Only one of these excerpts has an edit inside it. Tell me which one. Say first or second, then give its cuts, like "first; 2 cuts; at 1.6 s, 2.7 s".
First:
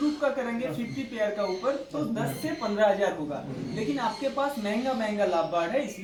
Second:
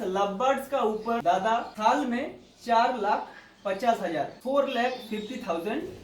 second; 2 cuts; at 1.7 s, 4.4 s